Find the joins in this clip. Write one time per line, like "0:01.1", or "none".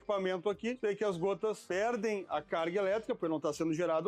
0:00.8
0:01.6